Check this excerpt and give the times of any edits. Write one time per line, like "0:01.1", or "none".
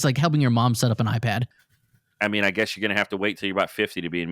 0:01.5